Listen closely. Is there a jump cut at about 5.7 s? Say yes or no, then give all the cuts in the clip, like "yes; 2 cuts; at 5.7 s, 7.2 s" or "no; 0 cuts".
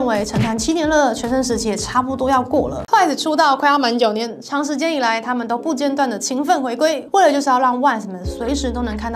no; 1 cut; at 2.8 s